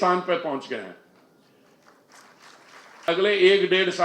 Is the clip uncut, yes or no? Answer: no